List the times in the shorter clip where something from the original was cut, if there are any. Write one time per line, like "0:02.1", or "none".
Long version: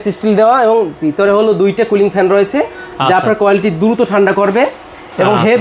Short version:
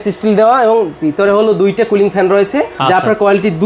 0:02.7